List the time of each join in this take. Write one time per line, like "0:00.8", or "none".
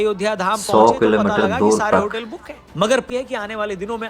0:03.0